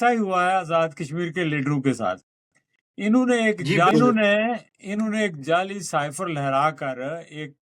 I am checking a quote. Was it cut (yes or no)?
yes